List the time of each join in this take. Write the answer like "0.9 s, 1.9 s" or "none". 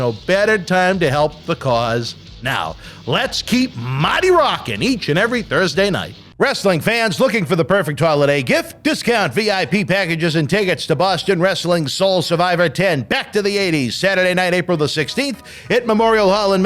6.2 s